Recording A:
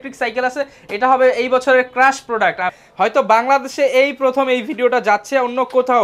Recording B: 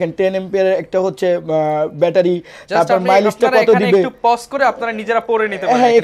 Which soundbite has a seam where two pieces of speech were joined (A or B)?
A